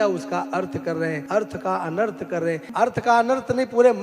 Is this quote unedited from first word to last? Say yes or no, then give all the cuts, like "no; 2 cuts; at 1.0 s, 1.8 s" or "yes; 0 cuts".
no; 2 cuts; at 1.2 s, 2.7 s